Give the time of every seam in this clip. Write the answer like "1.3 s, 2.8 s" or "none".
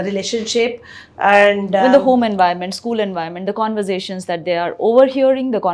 1.8 s

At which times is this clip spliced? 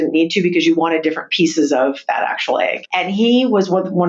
2.8 s

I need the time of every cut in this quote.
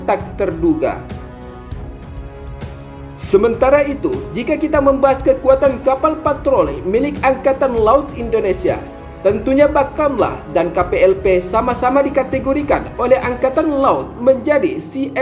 1.0 s, 2.9 s

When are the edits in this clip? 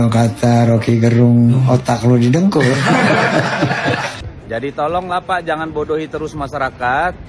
4.2 s

